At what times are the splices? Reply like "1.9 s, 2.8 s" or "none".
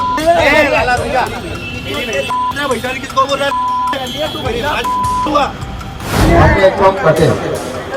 6.2 s

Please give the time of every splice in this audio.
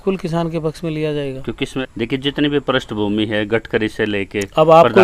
1.8 s

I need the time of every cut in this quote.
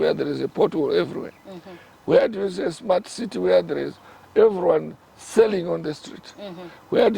none

